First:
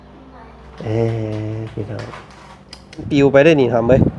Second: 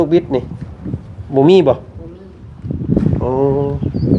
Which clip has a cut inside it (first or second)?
first